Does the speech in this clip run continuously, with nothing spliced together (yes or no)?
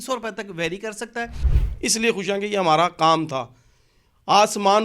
no